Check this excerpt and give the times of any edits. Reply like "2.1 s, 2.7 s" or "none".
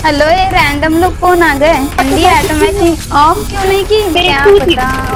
2.0 s, 4.1 s